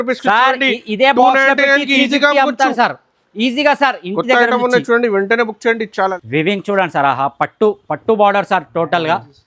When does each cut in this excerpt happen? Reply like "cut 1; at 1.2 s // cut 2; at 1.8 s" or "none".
cut 1; at 6.1 s